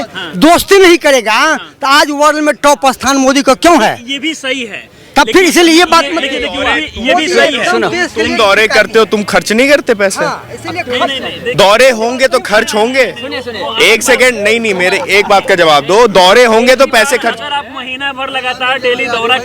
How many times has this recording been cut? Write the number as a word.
zero